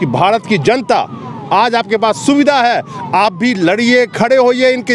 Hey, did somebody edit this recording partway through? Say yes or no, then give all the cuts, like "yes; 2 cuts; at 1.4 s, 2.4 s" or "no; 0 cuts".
no; 0 cuts